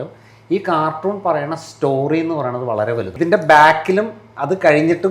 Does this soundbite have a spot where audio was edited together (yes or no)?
yes